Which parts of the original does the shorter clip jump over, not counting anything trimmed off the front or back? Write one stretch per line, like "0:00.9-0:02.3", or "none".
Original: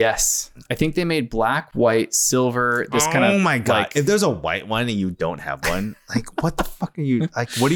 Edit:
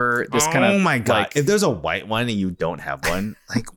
none